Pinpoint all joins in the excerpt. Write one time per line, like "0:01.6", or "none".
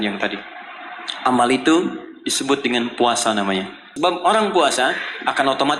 0:03.8